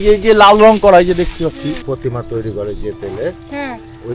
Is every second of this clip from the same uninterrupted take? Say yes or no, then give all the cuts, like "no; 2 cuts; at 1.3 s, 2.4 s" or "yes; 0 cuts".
no; 1 cut; at 1.8 s